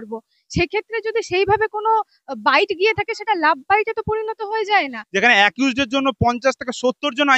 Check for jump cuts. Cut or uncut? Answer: cut